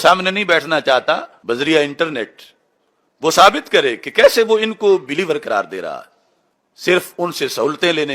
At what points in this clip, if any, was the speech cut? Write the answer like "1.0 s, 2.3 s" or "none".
1.3 s